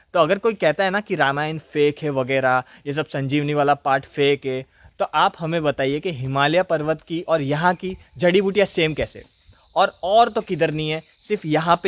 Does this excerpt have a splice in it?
no; 0 cuts

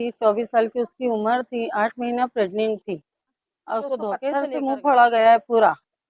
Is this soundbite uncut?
no; 1 cut; at 4.3 s

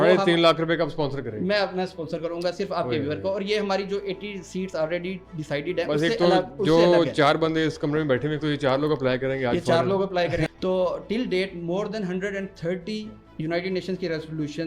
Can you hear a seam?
yes; 2 cuts; at 10.5 s, 13.2 s

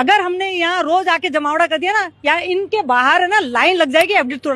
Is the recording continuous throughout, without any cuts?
yes; 0 cuts

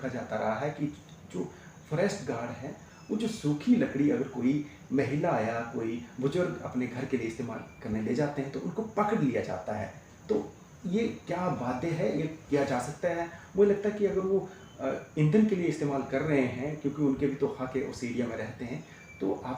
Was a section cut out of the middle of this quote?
no; 0 cuts

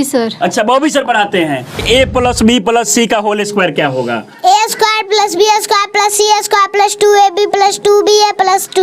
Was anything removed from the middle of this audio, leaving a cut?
yes; 1 cut; at 1.8 s

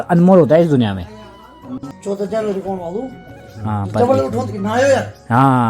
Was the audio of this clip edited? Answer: yes; 1 cut; at 1.8 s

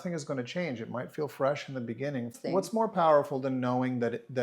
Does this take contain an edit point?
yes; 1 cut; at 2.3 s

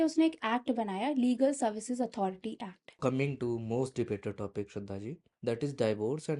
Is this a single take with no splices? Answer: no; 1 cut; at 3.0 s

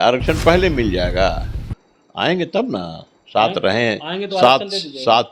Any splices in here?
no; 0 cuts

